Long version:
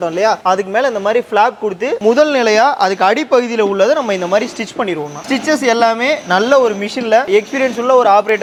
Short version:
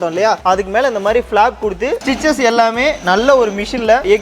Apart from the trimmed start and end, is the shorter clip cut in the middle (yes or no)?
yes